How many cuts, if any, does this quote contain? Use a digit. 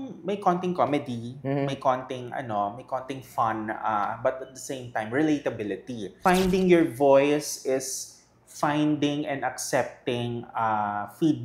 1